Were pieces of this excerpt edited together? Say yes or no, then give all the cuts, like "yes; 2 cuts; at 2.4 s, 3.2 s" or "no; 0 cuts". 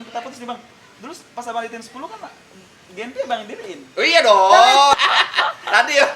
yes; 1 cut; at 4.9 s